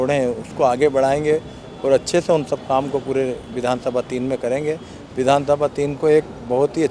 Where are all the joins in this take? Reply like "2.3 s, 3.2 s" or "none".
none